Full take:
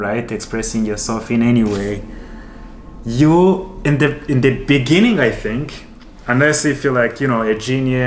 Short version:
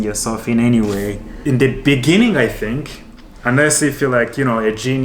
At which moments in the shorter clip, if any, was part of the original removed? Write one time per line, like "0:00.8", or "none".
0:01.4